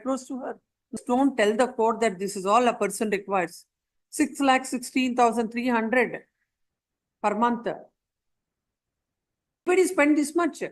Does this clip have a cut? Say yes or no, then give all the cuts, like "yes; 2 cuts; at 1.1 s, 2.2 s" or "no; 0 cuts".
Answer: yes; 2 cuts; at 0.9 s, 9.7 s